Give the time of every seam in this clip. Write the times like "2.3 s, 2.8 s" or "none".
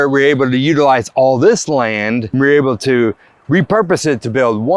2.3 s